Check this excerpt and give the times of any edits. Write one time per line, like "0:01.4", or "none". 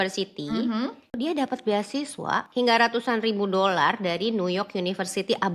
0:01.2
0:02.5